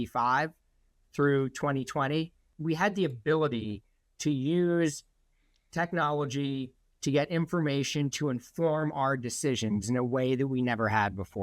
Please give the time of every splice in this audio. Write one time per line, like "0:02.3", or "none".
0:02.5